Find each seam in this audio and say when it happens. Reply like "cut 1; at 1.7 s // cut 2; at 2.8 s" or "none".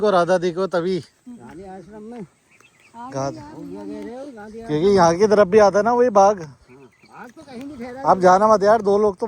none